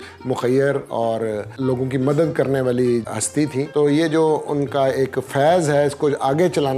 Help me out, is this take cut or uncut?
cut